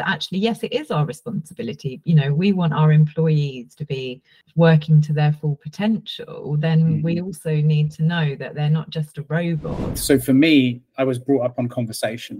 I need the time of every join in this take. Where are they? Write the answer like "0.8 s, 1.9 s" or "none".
4.4 s, 9.9 s